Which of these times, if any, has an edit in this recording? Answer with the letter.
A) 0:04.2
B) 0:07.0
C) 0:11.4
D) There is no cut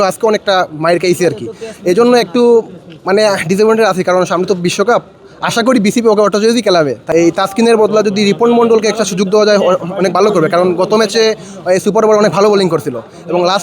B